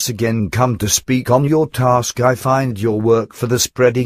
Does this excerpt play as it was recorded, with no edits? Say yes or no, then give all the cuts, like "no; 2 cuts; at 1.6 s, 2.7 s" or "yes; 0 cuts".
no; 1 cut; at 3.1 s